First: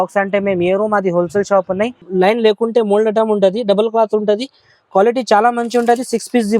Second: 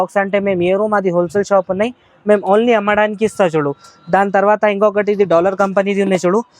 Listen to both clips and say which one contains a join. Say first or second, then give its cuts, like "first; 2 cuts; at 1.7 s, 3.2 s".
first; 1 cut; at 2.0 s